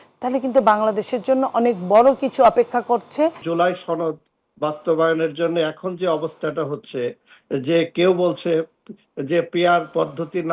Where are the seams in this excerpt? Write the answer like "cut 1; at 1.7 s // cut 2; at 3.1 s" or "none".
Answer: cut 1; at 3.4 s